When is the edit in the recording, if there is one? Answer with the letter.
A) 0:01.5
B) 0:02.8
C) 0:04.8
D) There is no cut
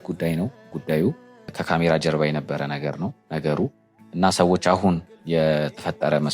A